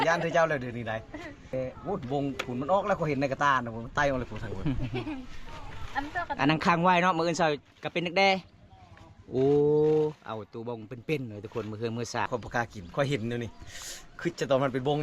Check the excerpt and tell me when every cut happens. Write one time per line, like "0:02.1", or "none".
0:01.5
0:12.3